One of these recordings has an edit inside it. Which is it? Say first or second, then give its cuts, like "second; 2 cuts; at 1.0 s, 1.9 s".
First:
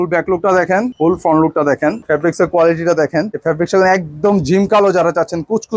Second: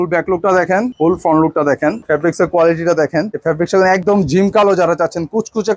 second; 1 cut; at 4.0 s